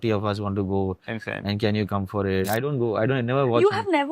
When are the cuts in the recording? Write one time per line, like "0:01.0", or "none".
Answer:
0:02.5